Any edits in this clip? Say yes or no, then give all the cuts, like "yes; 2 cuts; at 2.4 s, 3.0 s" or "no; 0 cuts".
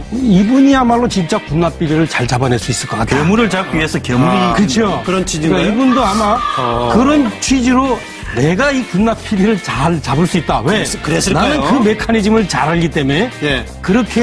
no; 0 cuts